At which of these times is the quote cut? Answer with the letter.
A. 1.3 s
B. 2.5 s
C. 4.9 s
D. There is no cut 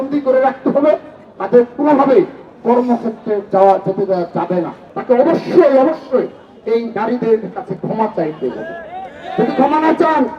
C